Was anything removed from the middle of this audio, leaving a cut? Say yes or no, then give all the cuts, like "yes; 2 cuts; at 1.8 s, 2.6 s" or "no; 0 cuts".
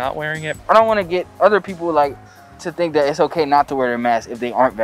no; 0 cuts